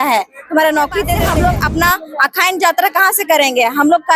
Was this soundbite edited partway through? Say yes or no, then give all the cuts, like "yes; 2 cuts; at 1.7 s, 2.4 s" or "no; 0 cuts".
yes; 1 cut; at 1.1 s